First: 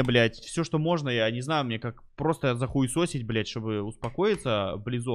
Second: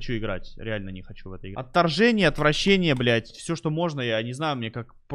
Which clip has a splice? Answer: second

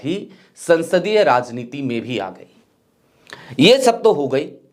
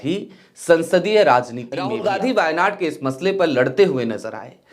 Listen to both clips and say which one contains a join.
second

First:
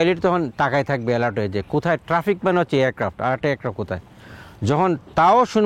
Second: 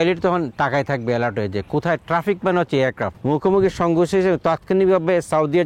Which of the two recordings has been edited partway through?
second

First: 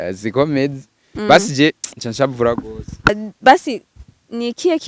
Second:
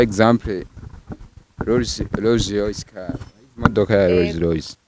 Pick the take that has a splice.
first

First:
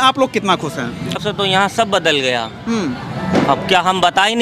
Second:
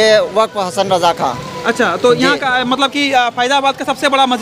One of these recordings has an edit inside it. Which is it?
first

